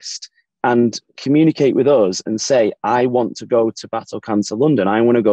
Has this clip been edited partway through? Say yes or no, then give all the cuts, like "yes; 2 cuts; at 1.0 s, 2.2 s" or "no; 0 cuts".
no; 0 cuts